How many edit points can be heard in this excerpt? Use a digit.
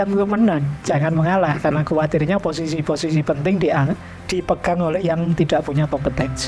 0